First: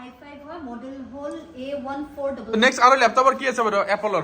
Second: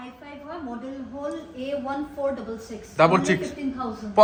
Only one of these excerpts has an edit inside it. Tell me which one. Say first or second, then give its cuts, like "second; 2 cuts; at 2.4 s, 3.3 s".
first; 1 cut; at 2.5 s